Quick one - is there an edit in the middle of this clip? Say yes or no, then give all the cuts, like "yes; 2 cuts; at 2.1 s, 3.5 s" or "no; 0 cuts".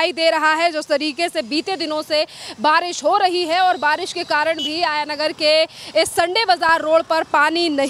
no; 0 cuts